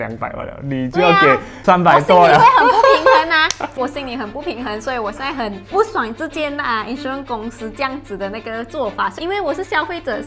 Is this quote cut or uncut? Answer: cut